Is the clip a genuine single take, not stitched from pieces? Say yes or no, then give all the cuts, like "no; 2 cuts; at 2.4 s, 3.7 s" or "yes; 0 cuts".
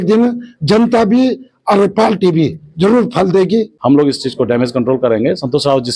no; 1 cut; at 3.7 s